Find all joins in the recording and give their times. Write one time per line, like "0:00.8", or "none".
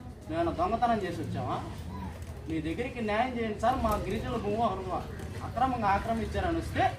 none